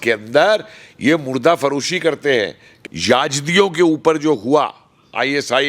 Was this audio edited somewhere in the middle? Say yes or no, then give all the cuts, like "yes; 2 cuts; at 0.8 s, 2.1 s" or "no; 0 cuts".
yes; 1 cut; at 2.6 s